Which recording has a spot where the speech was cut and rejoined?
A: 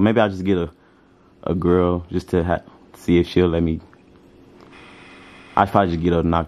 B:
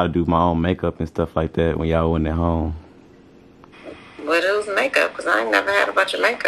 B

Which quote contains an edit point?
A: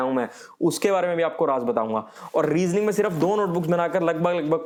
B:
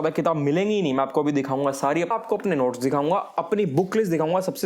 B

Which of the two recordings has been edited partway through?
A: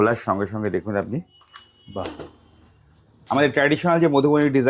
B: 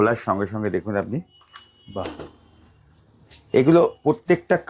A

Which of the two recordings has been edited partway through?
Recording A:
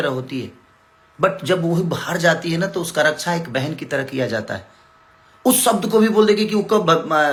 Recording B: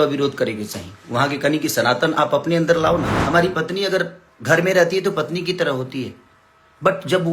B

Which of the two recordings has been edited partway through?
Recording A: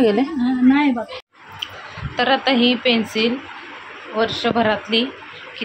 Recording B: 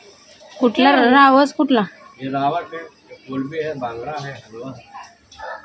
A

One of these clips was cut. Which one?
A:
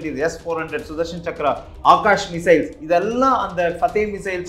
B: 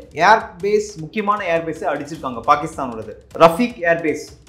B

